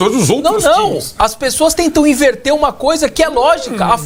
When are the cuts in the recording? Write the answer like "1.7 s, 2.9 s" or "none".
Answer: none